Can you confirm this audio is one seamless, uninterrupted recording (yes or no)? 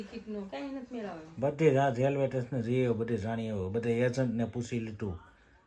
yes